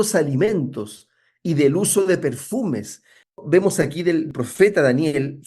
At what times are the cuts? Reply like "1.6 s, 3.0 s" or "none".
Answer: 3.4 s, 4.3 s